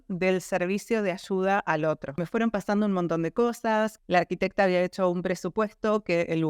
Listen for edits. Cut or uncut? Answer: cut